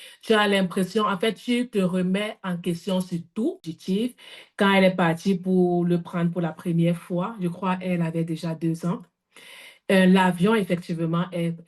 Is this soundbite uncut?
no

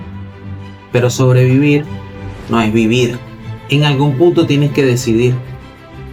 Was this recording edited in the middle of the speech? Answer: no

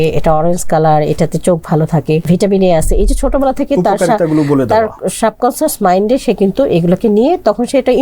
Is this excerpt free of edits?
no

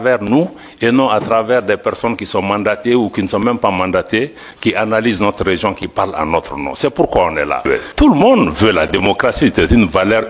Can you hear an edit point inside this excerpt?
yes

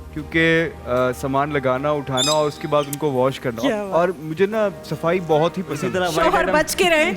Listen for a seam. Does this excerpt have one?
yes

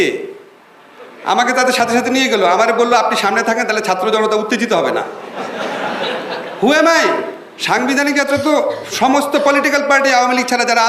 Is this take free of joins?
yes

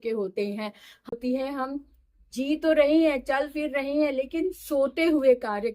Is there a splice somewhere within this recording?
yes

